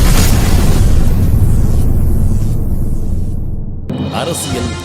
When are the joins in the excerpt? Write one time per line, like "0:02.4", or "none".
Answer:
0:03.9